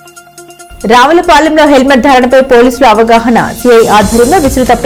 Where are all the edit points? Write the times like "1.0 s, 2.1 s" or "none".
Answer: none

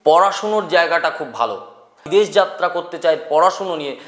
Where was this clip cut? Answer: 2.0 s

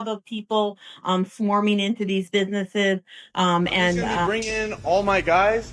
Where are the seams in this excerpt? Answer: 4.3 s

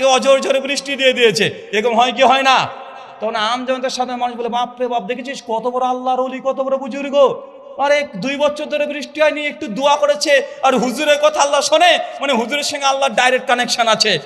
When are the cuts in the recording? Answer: none

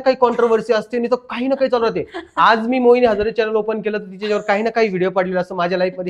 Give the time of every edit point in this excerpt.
none

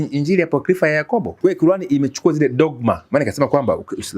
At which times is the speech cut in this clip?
1.3 s

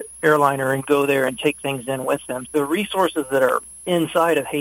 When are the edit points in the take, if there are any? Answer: 2.4 s

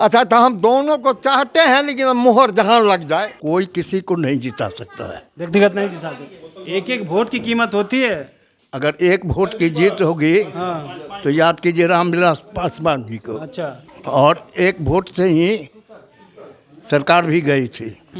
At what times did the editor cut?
3.3 s, 13.9 s

